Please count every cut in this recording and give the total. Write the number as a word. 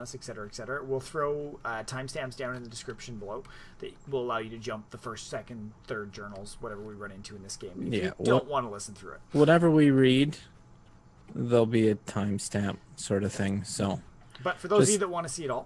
one